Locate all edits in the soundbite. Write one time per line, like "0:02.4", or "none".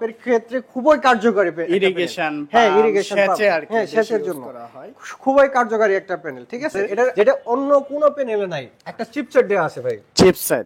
0:07.1